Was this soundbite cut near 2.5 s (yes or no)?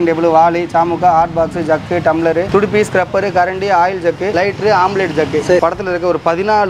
yes